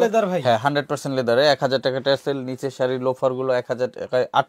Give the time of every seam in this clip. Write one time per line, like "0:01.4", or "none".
none